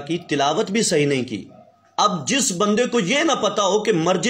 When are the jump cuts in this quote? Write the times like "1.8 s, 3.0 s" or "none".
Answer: 1.9 s